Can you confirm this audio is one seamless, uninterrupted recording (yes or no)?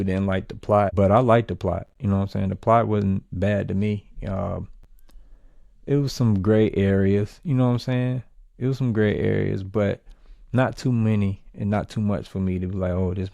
yes